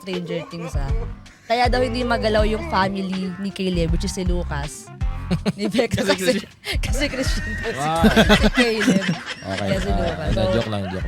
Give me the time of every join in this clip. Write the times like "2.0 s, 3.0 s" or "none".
none

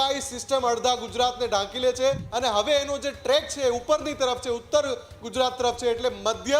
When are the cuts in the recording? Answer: 2.2 s

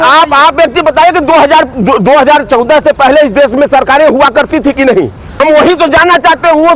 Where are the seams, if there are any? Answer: 5.2 s

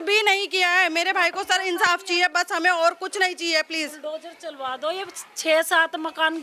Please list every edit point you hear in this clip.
none

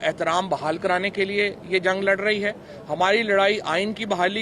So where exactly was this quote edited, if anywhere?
none

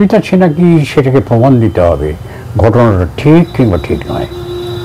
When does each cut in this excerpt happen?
none

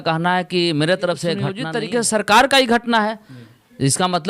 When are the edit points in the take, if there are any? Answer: 1.6 s

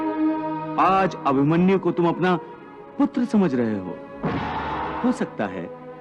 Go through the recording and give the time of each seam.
4.9 s

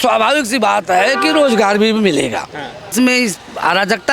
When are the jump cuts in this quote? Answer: 2.9 s

